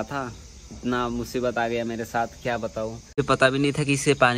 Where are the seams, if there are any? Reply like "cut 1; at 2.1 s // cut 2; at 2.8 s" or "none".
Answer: cut 1; at 3.2 s